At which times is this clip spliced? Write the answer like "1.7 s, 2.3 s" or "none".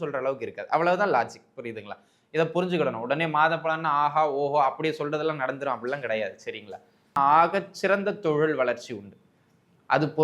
7.2 s

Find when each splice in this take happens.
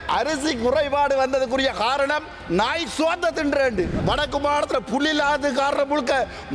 4.0 s

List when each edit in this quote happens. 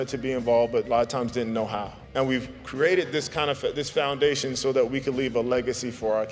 2.0 s

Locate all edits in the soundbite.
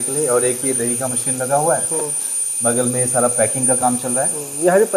none

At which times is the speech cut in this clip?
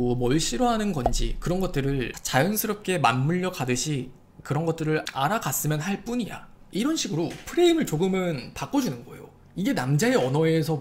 none

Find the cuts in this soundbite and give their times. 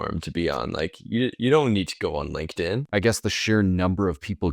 2.8 s

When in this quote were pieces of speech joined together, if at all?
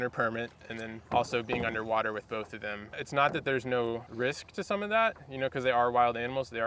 0.9 s, 2.9 s, 4.1 s

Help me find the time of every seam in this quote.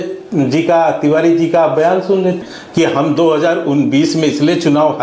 2.5 s

